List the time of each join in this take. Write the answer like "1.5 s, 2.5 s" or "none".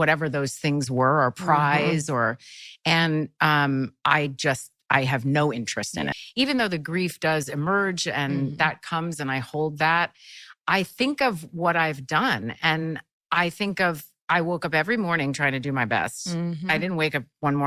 6.2 s